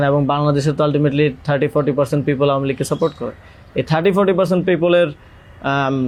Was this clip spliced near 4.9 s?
no; 0 cuts

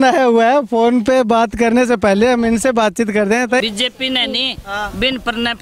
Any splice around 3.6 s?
yes; 1 cut; at 3.6 s

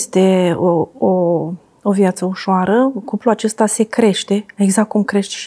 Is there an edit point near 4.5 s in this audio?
no; 0 cuts

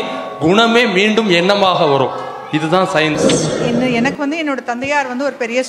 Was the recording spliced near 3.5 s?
yes; 1 cut; at 3.5 s

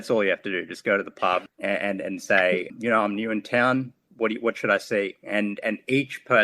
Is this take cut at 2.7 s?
yes; 2 cuts; at 1.5 s, 2.7 s

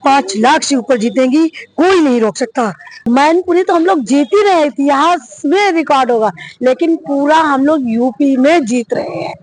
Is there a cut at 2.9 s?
yes; 1 cut; at 2.9 s

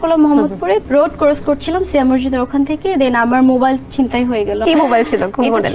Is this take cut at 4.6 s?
yes; 2 cuts; at 0.8 s, 4.6 s

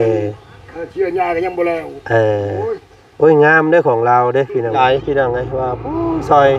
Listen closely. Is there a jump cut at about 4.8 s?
yes; 1 cut; at 4.8 s

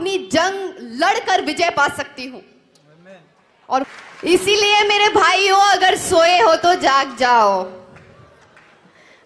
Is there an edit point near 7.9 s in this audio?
no; 1 cut; at 3.9 s

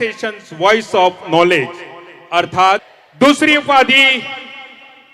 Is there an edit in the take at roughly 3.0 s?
yes; 1 cut; at 3.0 s

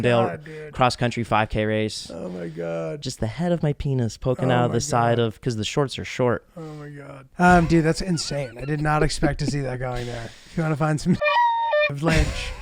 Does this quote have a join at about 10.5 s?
no; 1 cut; at 7.3 s

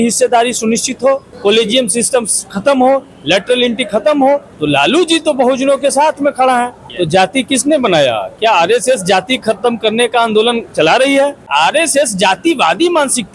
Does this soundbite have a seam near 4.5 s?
yes; 4 cuts; at 1.3 s, 4.5 s, 6.8 s, 11.5 s

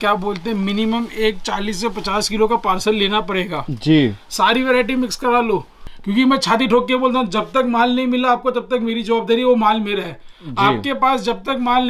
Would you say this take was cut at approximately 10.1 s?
no; 1 cut; at 5.8 s

